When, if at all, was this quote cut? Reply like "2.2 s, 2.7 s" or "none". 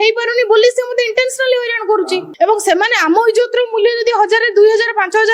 2.3 s